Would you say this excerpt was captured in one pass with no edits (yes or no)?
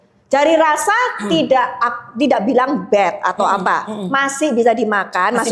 yes